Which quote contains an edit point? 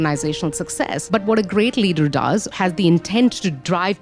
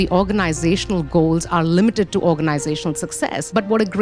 first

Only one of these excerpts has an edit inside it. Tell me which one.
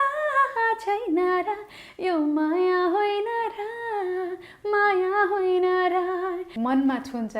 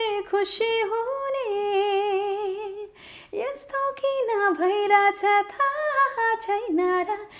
first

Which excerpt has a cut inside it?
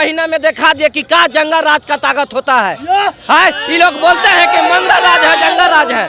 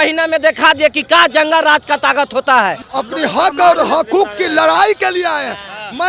second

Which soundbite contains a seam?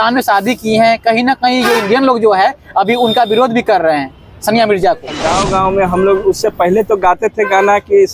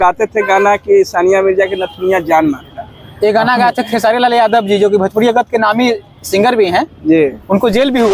first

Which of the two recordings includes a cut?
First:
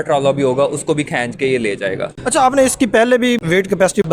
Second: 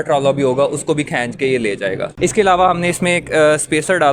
second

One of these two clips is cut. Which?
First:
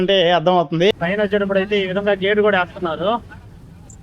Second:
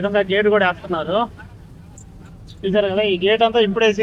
first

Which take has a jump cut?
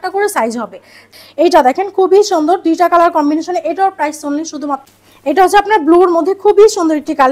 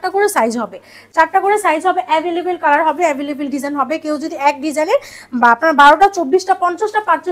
first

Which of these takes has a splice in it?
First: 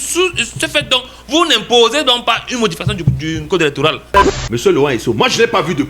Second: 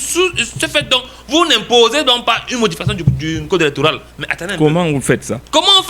first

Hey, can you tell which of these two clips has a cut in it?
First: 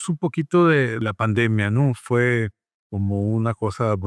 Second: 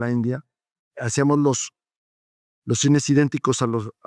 first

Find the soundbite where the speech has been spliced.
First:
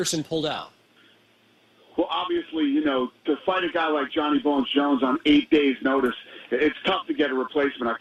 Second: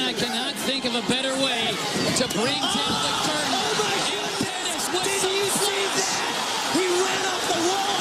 second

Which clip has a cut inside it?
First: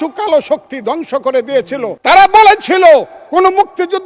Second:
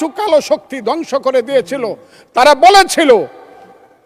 first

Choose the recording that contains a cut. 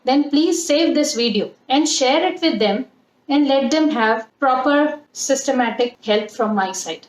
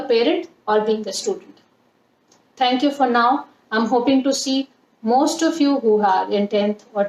first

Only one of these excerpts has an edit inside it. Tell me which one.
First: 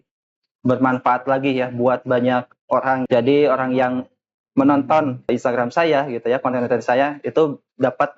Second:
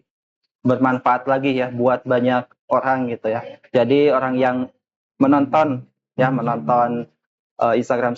first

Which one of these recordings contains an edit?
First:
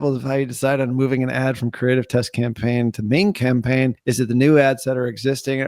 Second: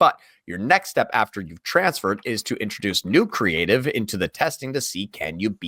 first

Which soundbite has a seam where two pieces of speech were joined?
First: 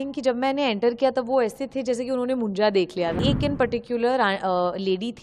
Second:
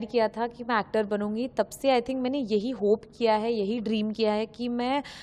first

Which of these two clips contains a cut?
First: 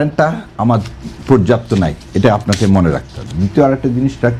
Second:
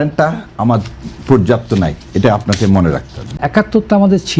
second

